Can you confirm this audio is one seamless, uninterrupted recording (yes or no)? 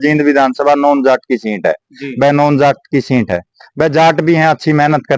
yes